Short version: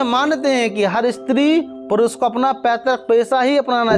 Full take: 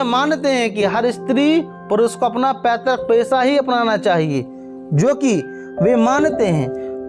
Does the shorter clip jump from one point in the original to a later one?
no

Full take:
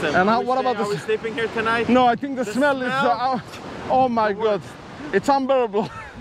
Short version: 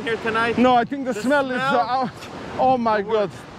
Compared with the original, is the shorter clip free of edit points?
yes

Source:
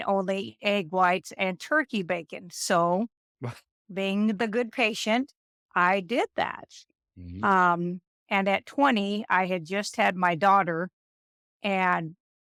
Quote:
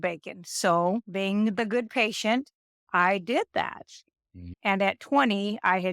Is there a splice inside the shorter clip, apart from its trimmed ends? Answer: yes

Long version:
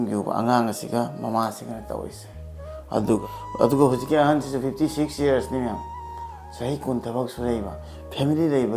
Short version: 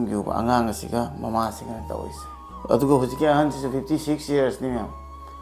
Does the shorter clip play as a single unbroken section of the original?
no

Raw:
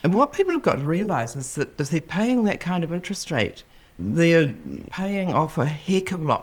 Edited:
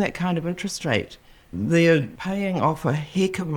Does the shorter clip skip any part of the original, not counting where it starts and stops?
yes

